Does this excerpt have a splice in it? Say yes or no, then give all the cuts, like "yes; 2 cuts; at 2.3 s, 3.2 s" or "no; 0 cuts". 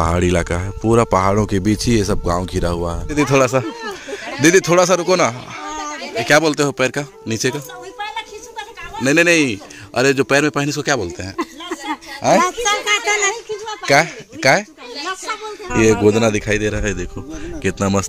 yes; 3 cuts; at 3.1 s, 6.2 s, 15.7 s